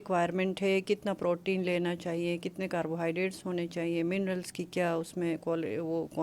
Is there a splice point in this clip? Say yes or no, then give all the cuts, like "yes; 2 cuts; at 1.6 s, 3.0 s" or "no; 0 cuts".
no; 0 cuts